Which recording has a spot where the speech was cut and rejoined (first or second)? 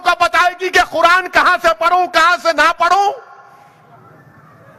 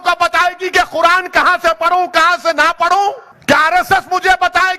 second